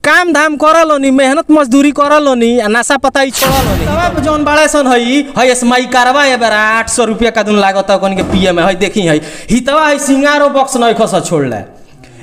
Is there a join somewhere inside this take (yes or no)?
yes